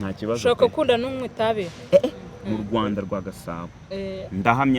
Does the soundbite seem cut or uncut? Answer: cut